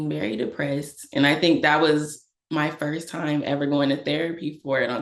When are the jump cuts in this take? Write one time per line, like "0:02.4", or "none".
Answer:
none